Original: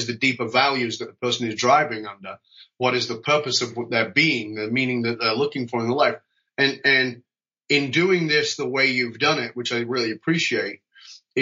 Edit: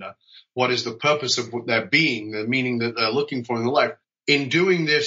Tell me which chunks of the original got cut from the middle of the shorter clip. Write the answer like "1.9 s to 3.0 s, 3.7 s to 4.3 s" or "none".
6.3 s to 7.5 s

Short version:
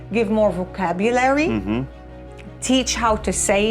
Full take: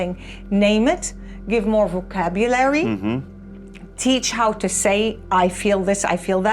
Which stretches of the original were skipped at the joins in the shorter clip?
none

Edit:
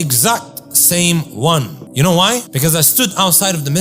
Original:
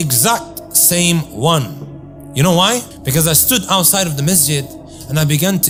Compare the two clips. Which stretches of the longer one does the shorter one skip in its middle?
1.8 s to 2.2 s, 2.9 s to 3.0 s

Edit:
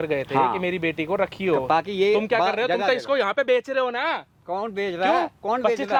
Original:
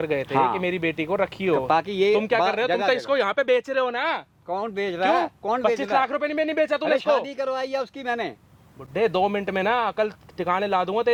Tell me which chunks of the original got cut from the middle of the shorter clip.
none

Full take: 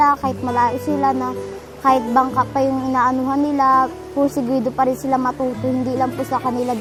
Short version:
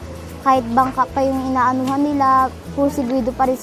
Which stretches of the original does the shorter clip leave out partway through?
none

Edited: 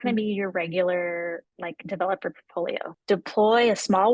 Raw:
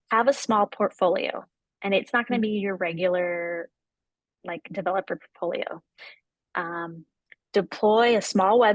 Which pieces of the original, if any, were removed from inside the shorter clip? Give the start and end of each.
3.8 s to 4.4 s, 5.8 s to 7.4 s

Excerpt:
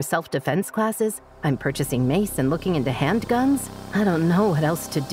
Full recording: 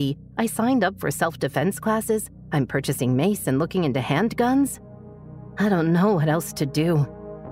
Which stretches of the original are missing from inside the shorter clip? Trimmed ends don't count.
4.9 s to 5.4 s

